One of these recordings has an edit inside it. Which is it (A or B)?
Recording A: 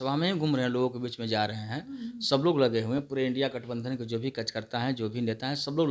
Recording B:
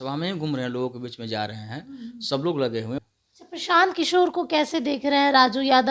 B